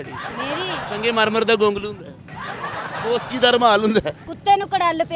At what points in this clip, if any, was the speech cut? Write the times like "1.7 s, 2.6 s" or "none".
none